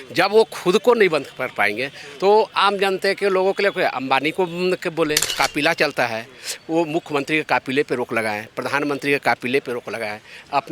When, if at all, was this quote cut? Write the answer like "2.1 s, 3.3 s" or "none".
5.3 s